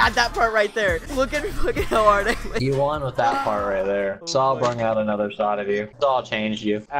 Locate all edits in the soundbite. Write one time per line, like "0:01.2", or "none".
0:01.0
0:02.5
0:04.2